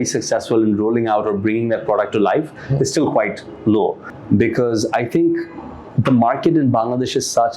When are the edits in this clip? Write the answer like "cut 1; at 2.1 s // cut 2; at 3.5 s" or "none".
cut 1; at 4.1 s

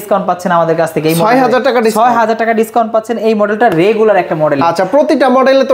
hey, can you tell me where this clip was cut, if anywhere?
none

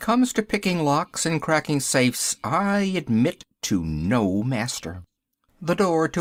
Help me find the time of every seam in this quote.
none

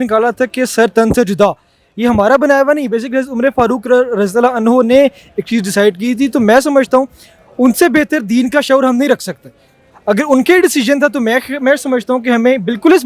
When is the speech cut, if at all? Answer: none

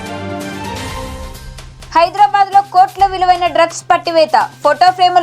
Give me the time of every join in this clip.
cut 1; at 1.5 s

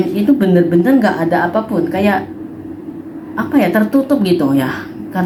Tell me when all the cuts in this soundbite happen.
none

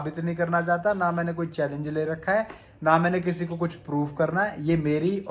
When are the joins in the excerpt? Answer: none

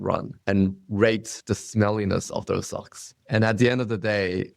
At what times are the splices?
cut 1; at 1.3 s

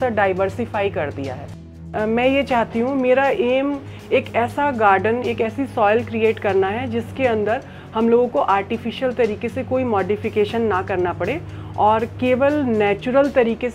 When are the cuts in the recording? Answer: cut 1; at 1.9 s

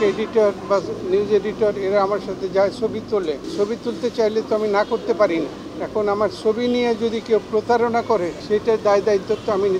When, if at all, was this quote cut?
cut 1; at 3.5 s // cut 2; at 5.6 s // cut 3; at 8.4 s

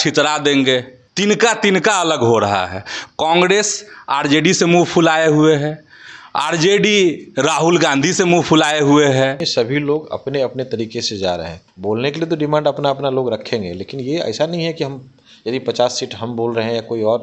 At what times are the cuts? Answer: cut 1; at 1.0 s // cut 2; at 9.4 s // cut 3; at 11.6 s

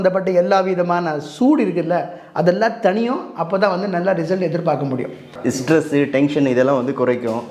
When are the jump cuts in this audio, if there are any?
cut 1; at 5.3 s

